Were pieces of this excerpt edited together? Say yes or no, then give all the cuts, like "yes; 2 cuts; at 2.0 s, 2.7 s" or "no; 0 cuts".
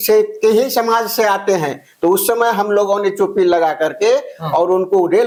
no; 0 cuts